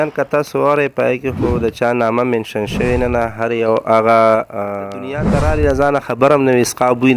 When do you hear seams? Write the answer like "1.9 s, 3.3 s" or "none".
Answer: 5.3 s